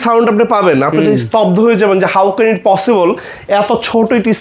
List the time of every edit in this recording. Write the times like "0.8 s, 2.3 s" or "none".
none